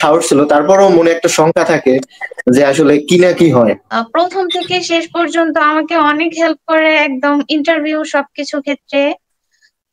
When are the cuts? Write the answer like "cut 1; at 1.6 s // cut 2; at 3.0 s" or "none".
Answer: cut 1; at 3.9 s